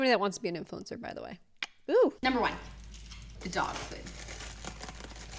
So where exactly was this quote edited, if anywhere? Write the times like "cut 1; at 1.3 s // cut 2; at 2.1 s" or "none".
none